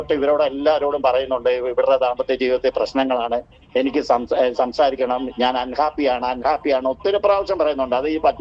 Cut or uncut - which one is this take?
uncut